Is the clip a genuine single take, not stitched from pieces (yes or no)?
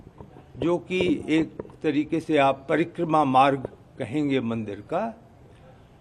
yes